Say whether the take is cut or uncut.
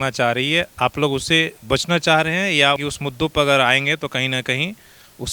cut